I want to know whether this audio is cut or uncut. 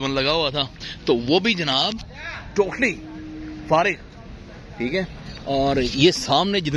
uncut